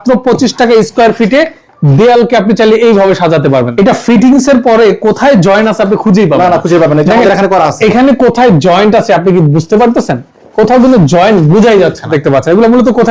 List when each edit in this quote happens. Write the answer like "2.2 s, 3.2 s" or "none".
3.7 s, 12.1 s